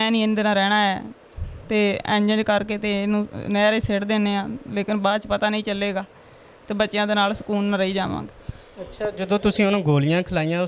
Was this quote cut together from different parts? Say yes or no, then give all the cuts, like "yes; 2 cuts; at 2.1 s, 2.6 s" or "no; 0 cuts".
no; 0 cuts